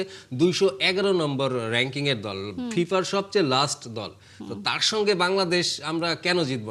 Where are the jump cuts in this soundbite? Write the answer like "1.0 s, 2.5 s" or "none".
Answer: none

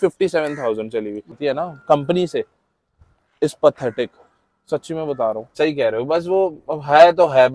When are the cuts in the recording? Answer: 1.4 s, 5.5 s

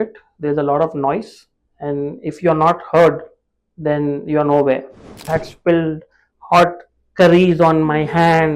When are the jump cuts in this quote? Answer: 5.3 s

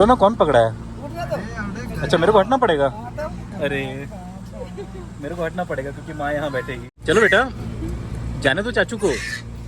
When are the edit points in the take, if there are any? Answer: 6.9 s

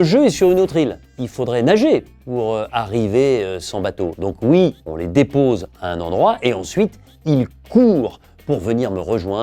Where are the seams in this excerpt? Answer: 1.1 s, 4.8 s

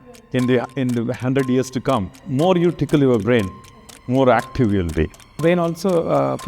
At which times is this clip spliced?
2.2 s, 5.4 s

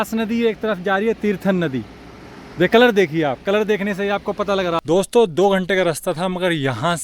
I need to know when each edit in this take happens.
4.8 s

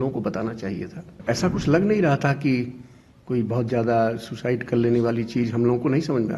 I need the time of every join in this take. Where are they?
1.2 s

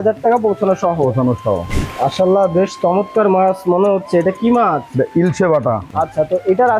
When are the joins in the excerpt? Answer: 1.6 s, 5.8 s

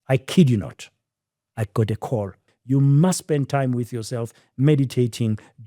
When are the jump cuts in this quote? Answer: 2.5 s

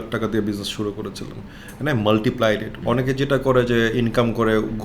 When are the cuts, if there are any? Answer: 2.8 s

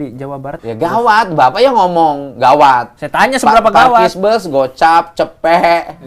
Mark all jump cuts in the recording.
1.0 s

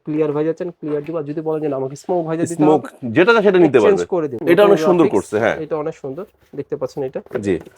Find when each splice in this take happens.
4.3 s

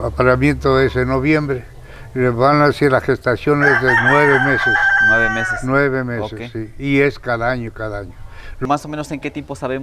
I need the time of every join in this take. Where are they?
8.6 s

